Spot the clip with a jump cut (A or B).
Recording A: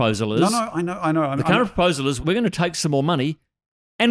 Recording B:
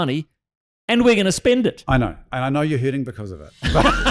A